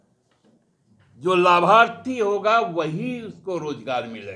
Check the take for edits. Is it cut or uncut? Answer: uncut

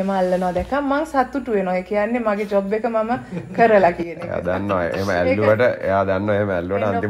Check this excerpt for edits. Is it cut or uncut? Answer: uncut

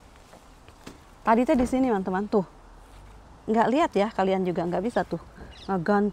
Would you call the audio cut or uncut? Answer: uncut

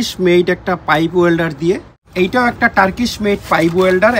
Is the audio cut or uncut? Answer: cut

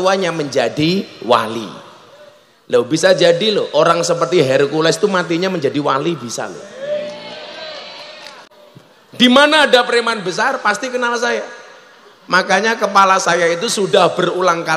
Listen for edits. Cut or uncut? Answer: cut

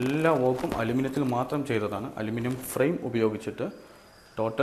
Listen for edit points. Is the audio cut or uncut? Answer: uncut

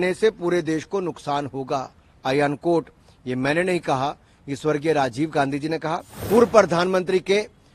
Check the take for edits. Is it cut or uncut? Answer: cut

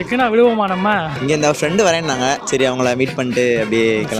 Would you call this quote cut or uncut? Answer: cut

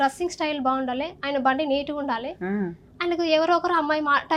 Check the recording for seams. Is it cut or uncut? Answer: uncut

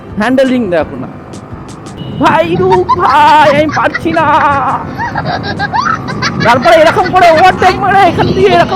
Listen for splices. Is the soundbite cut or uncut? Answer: cut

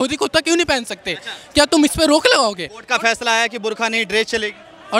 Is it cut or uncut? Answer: uncut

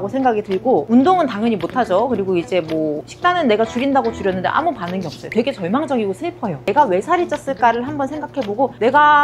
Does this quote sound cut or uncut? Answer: cut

